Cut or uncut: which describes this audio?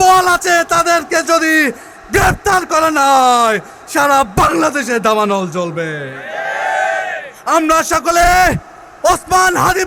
uncut